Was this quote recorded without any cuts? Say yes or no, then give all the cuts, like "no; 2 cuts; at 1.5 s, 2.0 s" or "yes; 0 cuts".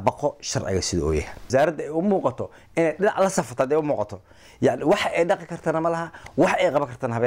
no; 1 cut; at 1.5 s